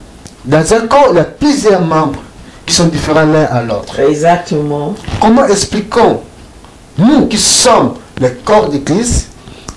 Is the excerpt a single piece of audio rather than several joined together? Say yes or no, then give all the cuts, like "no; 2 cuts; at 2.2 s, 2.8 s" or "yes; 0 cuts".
yes; 0 cuts